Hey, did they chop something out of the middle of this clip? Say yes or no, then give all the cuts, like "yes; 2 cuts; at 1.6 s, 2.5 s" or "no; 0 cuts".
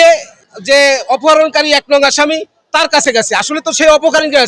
no; 0 cuts